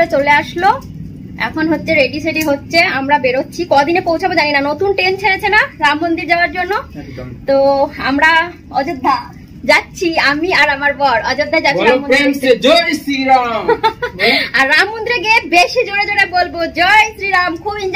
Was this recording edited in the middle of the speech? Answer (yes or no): no